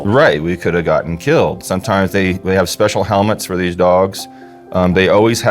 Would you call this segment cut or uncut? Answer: cut